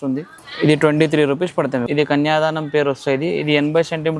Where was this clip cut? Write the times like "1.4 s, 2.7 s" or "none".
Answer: 1.8 s

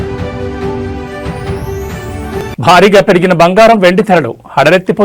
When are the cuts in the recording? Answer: 2.4 s

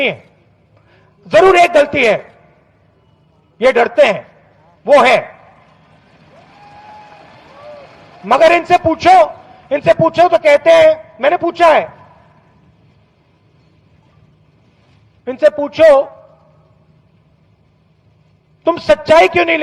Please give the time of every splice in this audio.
5.1 s

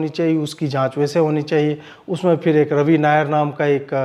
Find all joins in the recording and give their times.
none

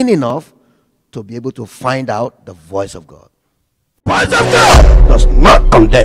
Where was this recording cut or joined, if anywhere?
4.0 s

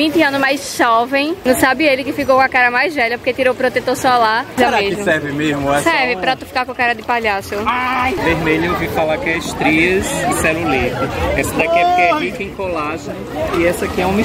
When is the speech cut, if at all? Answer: 1.4 s, 4.6 s, 8.2 s

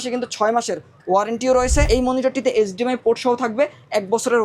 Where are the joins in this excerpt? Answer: 1.9 s

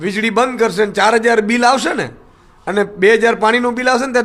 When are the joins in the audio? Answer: none

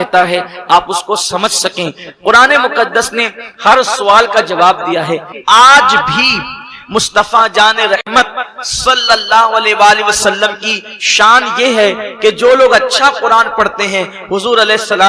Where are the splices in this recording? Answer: 5.3 s

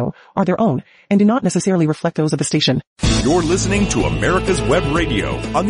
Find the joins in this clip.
2.9 s

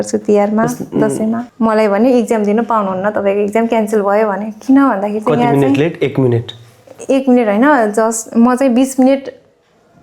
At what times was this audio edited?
1.4 s

